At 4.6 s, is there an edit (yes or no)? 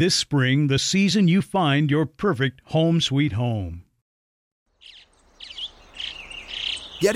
yes